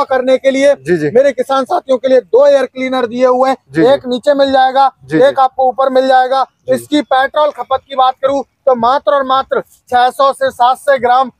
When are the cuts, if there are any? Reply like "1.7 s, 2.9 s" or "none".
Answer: none